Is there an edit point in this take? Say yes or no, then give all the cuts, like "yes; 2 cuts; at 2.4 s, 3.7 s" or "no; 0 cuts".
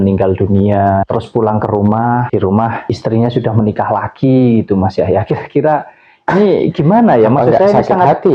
no; 0 cuts